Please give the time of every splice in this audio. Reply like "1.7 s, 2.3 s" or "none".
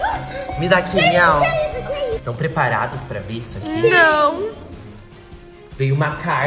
2.2 s